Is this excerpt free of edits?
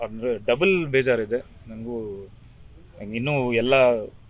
yes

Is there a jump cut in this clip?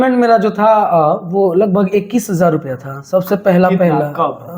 no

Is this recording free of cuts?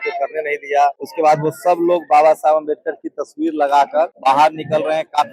no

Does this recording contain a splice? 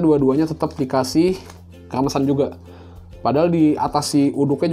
no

